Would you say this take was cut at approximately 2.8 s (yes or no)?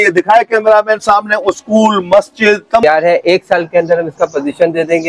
yes